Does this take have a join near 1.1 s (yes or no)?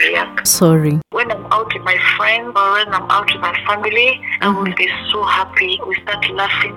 yes